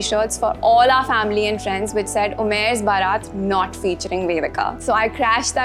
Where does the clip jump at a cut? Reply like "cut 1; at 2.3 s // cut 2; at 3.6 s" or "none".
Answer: none